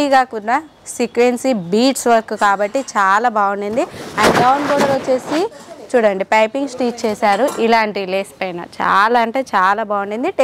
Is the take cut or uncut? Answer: uncut